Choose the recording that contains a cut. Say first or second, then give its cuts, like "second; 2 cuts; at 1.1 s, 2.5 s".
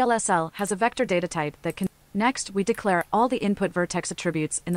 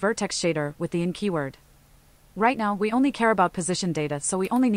first; 1 cut; at 1.9 s